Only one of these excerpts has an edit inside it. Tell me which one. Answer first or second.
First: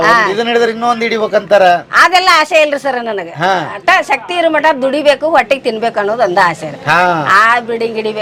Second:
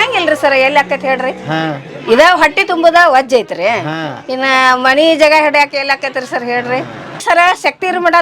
second